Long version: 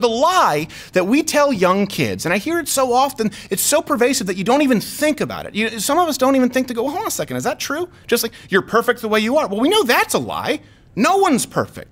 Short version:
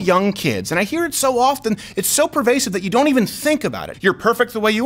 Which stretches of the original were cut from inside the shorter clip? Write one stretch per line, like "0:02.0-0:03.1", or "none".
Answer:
0:05.4-0:08.3